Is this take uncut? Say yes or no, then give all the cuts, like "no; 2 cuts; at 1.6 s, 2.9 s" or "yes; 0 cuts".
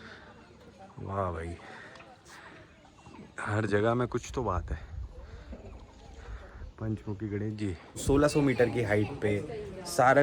no; 1 cut; at 8.0 s